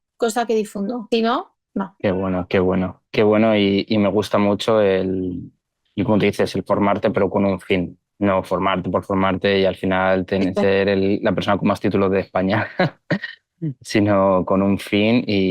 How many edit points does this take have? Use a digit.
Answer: 1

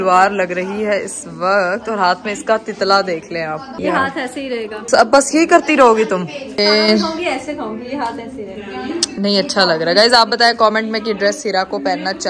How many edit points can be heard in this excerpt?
0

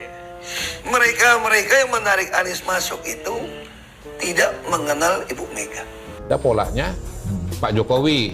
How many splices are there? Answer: 1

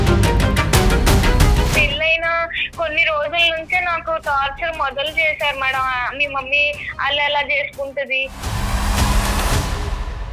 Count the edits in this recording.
2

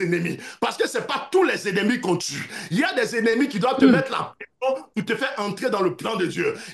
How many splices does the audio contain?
0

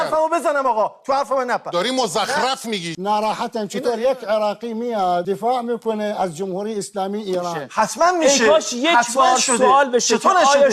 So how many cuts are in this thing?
3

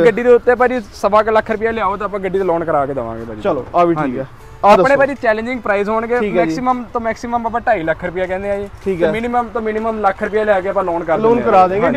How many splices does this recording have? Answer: 0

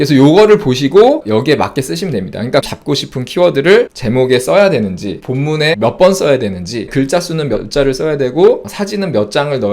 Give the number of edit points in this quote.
3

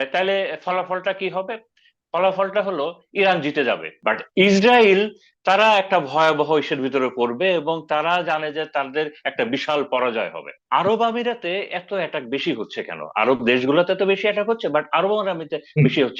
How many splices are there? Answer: 2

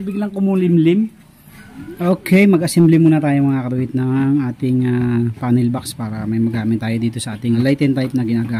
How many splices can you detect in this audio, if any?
2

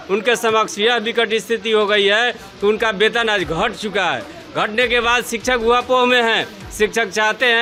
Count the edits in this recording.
0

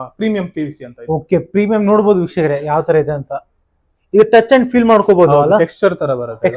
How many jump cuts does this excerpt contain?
0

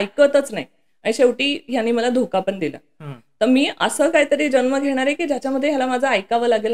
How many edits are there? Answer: 0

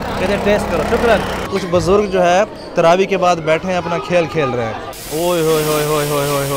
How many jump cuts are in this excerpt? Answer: 2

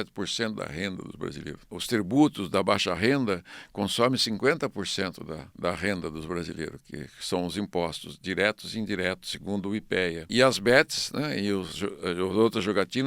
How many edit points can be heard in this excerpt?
3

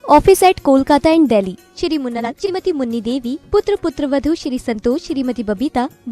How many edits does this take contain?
1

